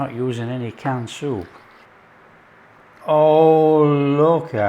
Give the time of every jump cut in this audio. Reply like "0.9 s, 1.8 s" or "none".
1.9 s